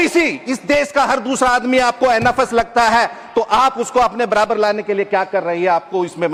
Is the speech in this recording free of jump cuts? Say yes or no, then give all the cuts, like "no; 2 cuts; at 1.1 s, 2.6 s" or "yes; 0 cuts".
yes; 0 cuts